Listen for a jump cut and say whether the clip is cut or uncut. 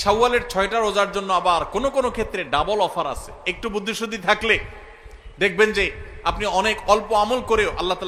uncut